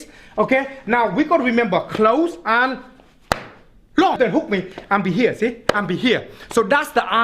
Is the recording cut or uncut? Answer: cut